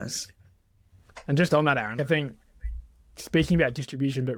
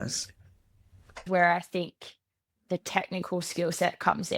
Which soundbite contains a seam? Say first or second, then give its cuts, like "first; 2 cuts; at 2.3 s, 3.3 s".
second; 1 cut; at 1.2 s